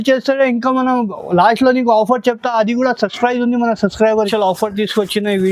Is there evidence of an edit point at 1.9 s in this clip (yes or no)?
no